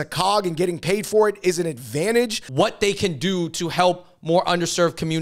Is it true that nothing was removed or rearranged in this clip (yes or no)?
no